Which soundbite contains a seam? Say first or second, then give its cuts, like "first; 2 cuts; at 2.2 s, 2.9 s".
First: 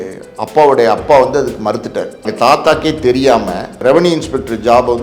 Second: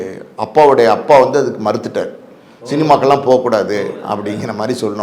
first; 2 cuts; at 2.3 s, 3.7 s